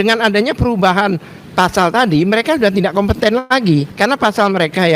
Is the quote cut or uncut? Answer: cut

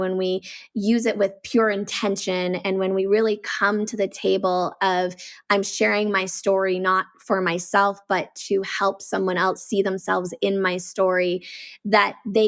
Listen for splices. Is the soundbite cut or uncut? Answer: uncut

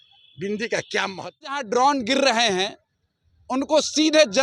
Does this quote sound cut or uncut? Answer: cut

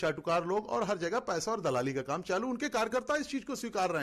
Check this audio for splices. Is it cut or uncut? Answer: uncut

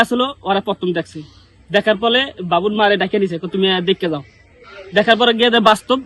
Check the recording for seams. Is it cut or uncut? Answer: uncut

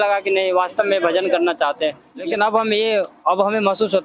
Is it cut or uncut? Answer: cut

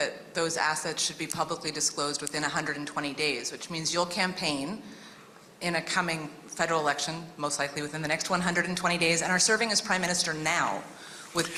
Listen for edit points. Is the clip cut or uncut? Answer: uncut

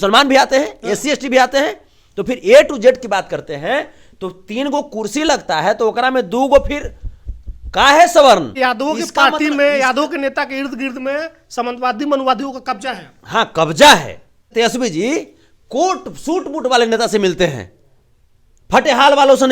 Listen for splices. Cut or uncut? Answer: cut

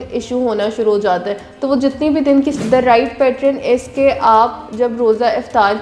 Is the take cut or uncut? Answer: cut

